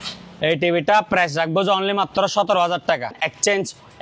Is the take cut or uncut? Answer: cut